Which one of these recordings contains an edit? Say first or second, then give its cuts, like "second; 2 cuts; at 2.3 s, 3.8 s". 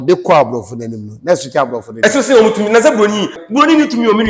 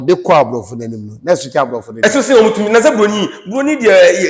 first; 1 cut; at 3.4 s